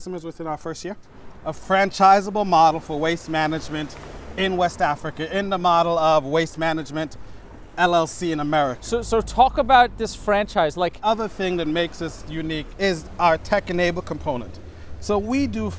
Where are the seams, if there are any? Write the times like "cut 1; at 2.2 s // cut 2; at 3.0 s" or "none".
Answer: cut 1; at 1.1 s // cut 2; at 11.0 s // cut 3; at 12.7 s